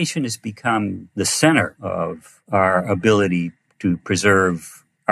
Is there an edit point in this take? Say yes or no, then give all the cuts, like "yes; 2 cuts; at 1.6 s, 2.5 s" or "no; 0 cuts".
yes; 2 cuts; at 1.0 s, 2.1 s